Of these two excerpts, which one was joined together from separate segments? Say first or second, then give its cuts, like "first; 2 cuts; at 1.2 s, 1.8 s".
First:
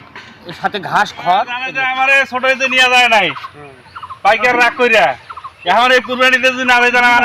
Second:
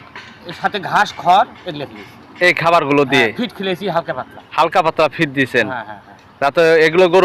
first; 1 cut; at 1.8 s